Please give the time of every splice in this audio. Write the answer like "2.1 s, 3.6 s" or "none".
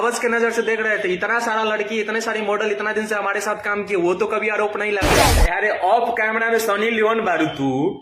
5.3 s